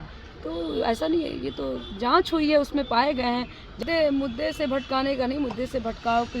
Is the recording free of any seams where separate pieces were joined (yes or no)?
no